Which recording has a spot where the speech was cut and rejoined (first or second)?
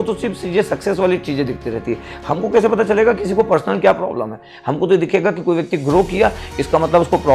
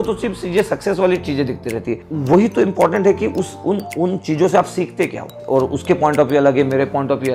second